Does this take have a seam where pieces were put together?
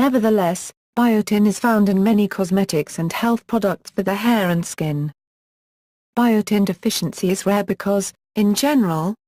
yes; 1 cut; at 1.3 s

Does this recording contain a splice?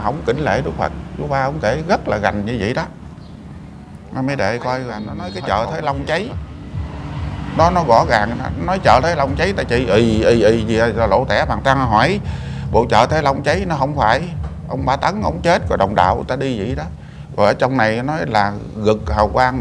yes; 1 cut; at 5.3 s

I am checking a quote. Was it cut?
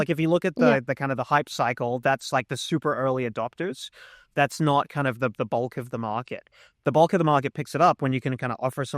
no; 0 cuts

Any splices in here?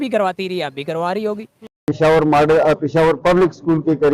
yes; 1 cut; at 1.7 s

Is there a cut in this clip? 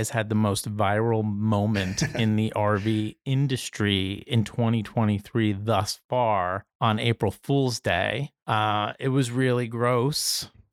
yes; 2 cuts; at 6.7 s, 8.3 s

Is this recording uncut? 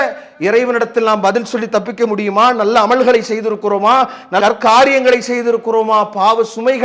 yes; 0 cuts

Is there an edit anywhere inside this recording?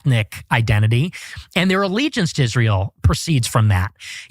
no; 0 cuts

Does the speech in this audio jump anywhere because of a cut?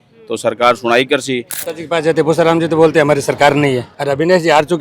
yes; 2 cuts; at 1.5 s, 3.9 s

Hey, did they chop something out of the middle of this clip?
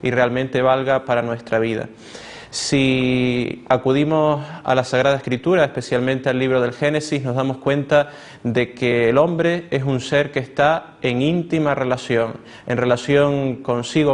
no; 0 cuts

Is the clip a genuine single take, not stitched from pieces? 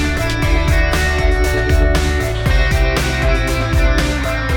yes; 0 cuts

